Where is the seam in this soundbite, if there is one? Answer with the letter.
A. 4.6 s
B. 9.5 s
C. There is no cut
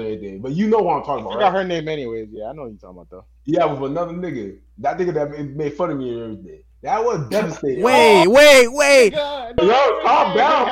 B